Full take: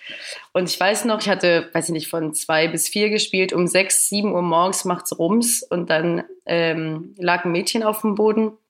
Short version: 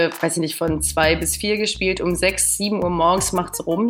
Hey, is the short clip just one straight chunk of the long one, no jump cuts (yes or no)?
yes